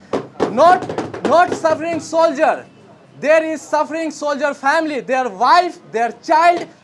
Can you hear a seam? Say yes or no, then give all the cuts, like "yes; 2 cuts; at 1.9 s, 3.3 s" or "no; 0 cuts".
no; 0 cuts